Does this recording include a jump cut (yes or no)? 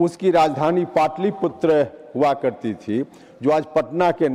no